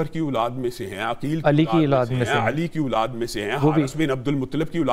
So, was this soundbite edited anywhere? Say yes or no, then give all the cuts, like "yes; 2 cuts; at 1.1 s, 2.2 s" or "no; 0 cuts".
no; 0 cuts